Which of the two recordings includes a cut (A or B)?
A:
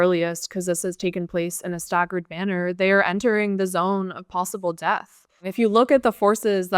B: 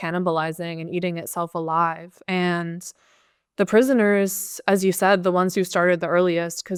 A